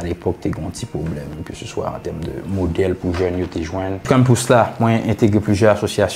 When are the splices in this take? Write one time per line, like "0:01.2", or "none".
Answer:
0:04.1